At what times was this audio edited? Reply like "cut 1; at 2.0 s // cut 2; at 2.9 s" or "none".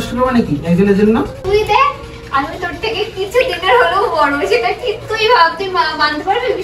cut 1; at 1.4 s